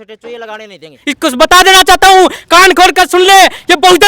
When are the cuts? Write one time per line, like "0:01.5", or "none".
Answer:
0:01.0